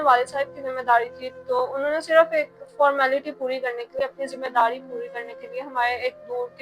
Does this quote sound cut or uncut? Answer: uncut